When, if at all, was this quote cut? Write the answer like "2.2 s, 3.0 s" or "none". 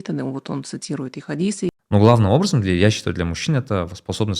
1.7 s

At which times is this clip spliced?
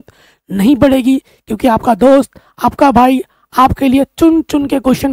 none

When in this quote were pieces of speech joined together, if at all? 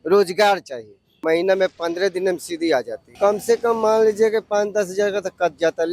1.2 s, 3.0 s

